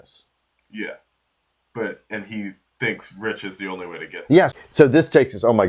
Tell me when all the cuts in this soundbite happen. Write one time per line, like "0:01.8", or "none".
0:04.5